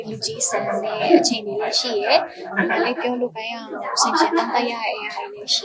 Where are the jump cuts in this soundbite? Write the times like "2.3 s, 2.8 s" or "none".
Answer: none